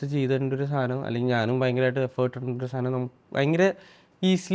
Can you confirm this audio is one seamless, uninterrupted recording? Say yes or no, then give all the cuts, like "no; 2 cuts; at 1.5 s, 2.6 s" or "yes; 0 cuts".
yes; 0 cuts